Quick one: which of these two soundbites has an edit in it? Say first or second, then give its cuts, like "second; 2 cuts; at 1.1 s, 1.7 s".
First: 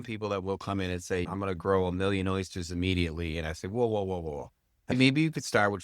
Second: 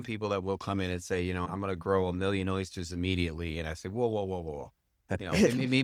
first; 2 cuts; at 1.3 s, 4.9 s